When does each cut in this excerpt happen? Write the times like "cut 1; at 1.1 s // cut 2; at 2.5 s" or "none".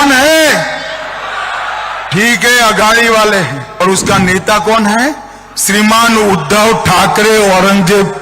cut 1; at 3.6 s